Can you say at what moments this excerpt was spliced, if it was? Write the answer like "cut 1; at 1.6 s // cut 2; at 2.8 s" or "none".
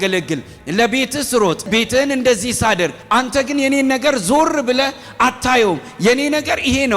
cut 1; at 1.7 s // cut 2; at 3.0 s